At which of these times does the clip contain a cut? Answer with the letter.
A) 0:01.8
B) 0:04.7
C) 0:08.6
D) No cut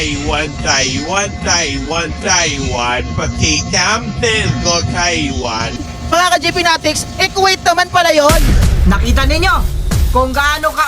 C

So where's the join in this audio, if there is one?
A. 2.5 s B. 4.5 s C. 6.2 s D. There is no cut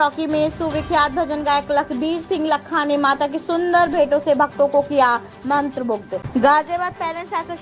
C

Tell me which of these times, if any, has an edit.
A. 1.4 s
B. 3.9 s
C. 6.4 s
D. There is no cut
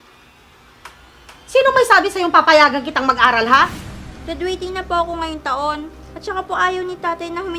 B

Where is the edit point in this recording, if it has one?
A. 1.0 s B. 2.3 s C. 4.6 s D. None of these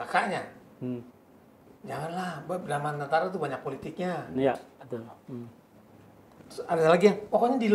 D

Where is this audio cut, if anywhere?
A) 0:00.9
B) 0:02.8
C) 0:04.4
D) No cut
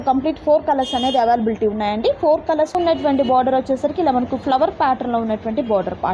B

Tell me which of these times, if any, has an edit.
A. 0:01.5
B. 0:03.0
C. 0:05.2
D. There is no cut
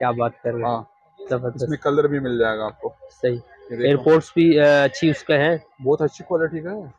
D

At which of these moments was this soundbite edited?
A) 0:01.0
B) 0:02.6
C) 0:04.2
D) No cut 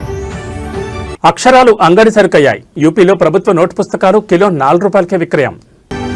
A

